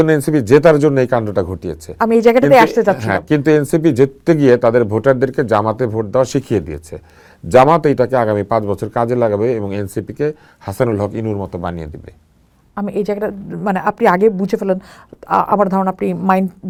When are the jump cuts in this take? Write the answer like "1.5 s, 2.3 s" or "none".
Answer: none